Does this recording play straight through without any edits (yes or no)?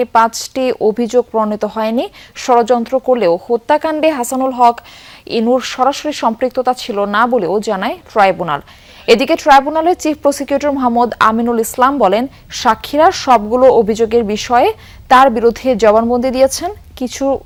yes